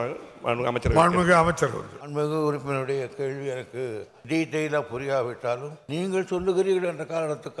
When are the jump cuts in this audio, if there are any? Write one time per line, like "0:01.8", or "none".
0:01.9
0:04.1
0:05.8